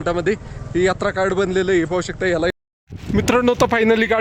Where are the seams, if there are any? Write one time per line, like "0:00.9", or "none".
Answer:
0:02.5